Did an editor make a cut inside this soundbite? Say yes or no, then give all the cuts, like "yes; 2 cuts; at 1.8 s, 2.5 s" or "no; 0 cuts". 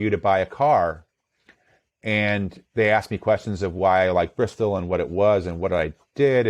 no; 0 cuts